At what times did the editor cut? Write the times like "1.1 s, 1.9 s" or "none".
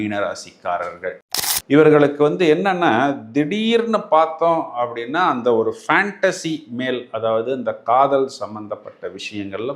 1.2 s